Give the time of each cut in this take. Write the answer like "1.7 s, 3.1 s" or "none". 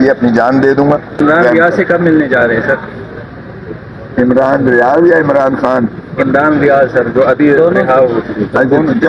1.2 s